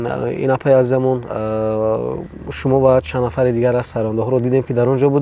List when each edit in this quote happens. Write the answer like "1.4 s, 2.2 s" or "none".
none